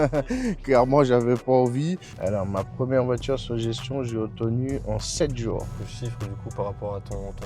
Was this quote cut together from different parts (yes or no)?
yes